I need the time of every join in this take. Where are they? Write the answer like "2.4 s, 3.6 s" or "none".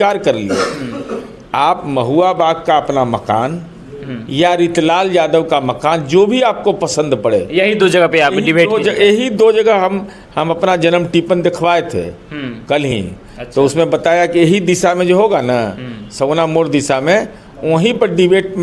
none